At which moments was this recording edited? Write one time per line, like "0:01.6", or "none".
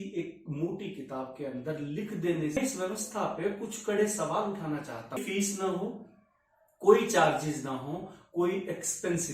0:02.6
0:05.2